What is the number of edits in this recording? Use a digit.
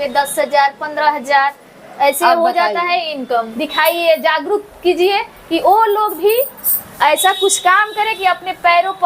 1